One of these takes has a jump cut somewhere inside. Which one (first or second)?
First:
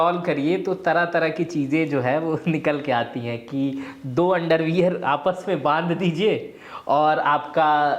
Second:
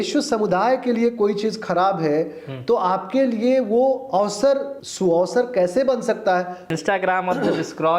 second